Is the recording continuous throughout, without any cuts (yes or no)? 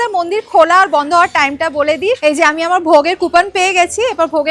no